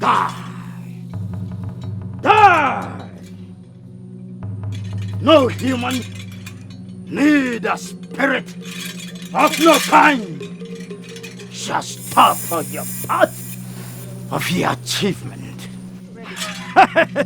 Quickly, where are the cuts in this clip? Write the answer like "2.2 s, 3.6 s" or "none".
5.0 s